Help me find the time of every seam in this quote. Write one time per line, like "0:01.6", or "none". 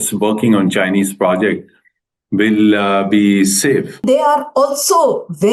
0:04.0